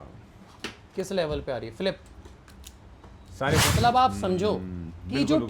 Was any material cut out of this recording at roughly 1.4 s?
no; 1 cut; at 3.7 s

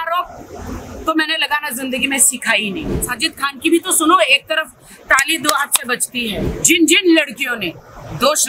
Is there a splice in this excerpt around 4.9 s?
no; 2 cuts; at 3.0 s, 6.5 s

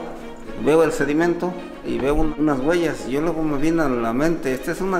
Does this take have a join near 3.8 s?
no; 1 cut; at 2.1 s

